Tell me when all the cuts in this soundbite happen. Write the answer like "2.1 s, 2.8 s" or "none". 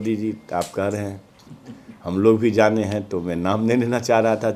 none